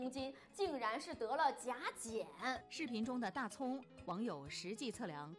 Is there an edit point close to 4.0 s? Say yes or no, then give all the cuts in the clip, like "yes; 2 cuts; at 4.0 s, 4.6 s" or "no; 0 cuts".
no; 1 cut; at 2.6 s